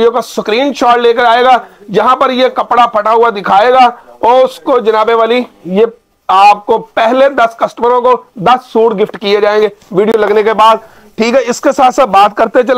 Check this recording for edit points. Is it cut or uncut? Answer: uncut